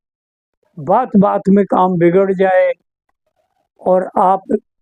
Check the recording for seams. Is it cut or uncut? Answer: uncut